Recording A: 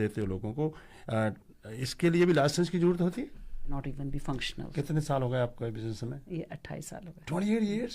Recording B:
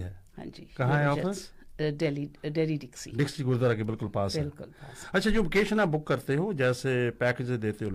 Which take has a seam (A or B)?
A